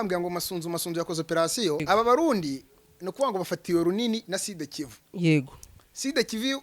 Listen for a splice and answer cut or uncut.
cut